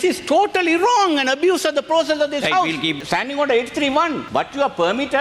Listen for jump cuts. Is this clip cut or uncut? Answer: cut